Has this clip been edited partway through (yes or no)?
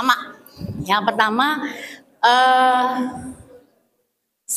no